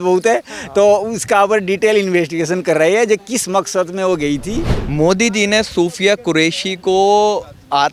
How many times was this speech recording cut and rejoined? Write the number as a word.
one